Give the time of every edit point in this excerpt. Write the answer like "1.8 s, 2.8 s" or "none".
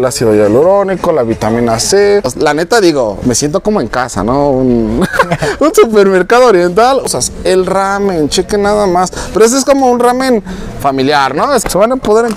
2.4 s, 7.1 s, 11.6 s

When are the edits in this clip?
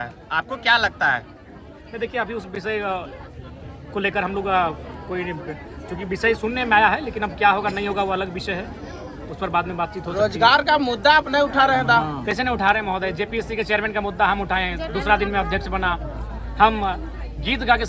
none

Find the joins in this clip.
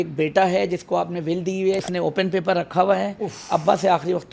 1.9 s

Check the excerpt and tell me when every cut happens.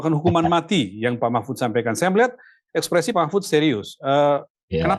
none

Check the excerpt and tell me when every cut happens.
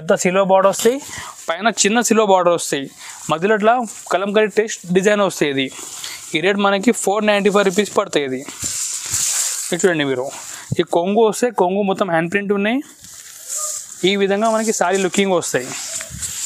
none

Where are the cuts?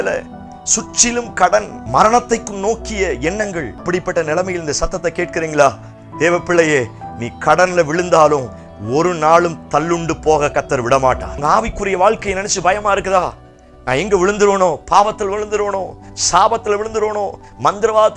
1.8 s, 3.8 s, 11.3 s

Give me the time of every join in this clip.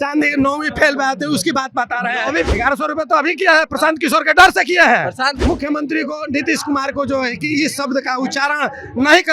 2.5 s, 5.4 s

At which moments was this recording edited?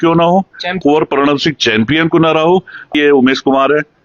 0.8 s, 2.9 s

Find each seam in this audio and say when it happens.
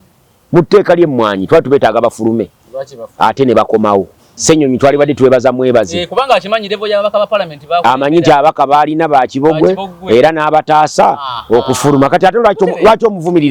4.3 s

